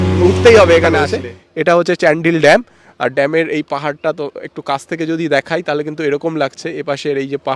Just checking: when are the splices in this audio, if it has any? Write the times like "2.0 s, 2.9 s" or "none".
1.0 s